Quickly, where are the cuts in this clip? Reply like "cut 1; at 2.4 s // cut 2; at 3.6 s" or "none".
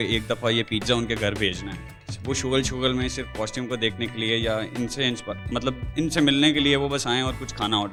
none